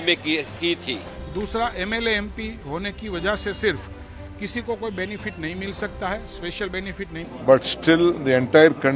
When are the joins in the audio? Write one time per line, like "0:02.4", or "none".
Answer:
0:01.2
0:07.3